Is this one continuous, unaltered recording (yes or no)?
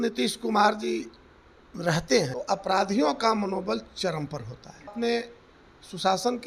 no